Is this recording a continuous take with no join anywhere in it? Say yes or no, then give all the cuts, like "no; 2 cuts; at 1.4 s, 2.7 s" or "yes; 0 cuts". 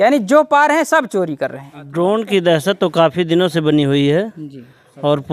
no; 1 cut; at 1.8 s